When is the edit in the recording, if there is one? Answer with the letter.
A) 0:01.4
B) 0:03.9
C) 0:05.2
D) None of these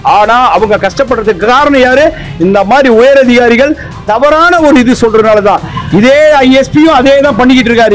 D